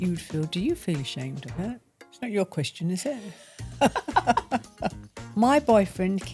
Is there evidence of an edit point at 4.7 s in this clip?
yes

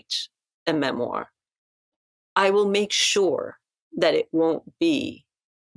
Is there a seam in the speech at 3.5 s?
no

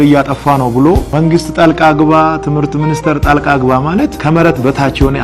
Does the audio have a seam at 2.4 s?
no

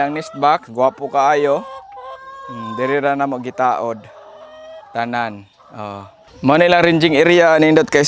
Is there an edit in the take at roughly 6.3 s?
yes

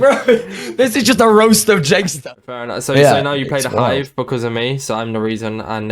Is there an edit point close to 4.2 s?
no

